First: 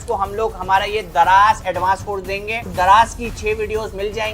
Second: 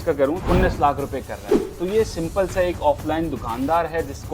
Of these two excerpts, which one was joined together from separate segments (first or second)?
first